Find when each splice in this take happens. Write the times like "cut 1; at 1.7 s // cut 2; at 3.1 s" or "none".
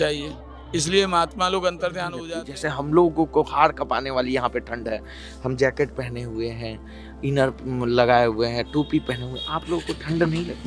cut 1; at 2.2 s